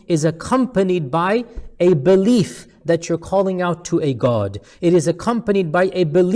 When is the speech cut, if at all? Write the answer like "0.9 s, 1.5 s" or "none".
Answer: none